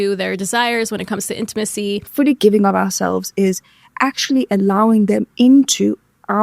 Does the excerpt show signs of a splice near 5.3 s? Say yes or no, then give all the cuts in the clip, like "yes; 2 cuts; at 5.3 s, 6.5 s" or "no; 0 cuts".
no; 1 cut; at 2.1 s